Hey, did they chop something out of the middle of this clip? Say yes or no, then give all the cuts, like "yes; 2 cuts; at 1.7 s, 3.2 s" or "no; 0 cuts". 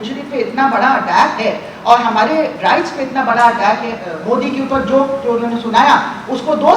yes; 1 cut; at 4.1 s